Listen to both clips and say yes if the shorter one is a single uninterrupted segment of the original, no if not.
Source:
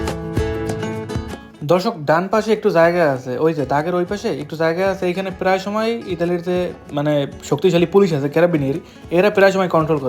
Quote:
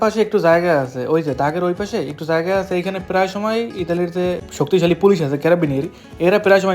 no